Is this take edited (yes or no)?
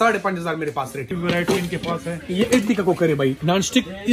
yes